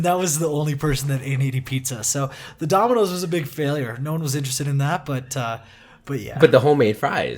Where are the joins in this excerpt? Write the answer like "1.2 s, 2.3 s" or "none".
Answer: 6.3 s